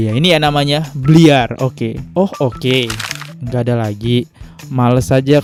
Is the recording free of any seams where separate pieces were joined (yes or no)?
yes